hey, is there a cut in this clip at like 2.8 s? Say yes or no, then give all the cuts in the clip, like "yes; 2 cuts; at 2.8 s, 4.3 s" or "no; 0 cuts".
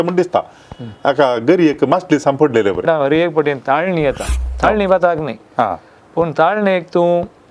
yes; 1 cut; at 2.8 s